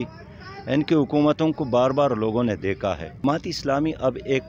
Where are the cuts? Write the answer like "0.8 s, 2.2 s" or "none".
3.2 s

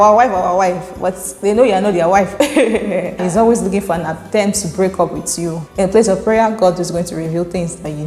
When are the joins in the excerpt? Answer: 3.1 s, 5.7 s

